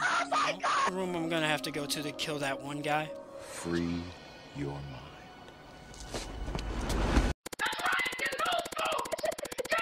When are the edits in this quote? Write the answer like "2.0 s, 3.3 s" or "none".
0.9 s